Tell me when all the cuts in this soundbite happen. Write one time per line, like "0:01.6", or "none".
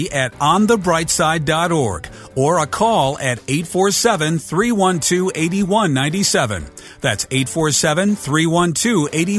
none